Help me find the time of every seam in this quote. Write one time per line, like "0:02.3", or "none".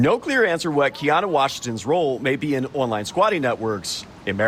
none